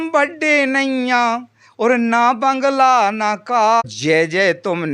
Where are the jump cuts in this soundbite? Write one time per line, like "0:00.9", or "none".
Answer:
0:03.8